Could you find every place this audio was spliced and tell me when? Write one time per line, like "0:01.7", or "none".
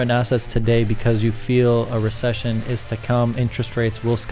none